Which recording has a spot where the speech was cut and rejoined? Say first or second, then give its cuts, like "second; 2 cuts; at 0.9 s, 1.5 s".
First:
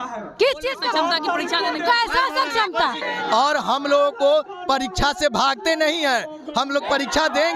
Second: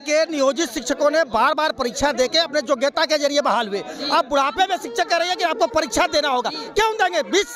first; 1 cut; at 3.0 s